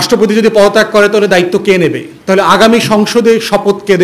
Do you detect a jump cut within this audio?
yes; 1 cut; at 2.1 s

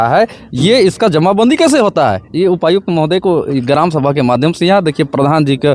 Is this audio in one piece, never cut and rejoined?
yes; 0 cuts

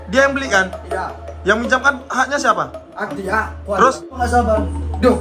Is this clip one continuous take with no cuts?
no; 1 cut; at 4.1 s

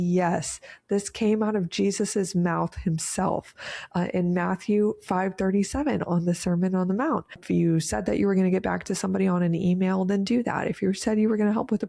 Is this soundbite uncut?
no; 1 cut; at 7.4 s

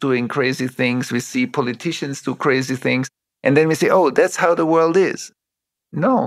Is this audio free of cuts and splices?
no; 2 cuts; at 3.2 s, 5.5 s

